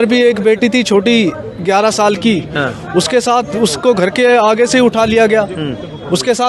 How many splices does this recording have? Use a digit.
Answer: 0